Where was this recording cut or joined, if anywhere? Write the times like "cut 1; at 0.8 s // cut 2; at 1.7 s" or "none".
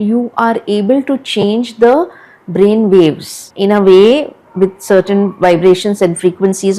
none